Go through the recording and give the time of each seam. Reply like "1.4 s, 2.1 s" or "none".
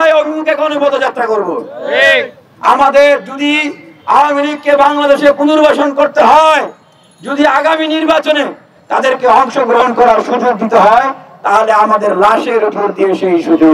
none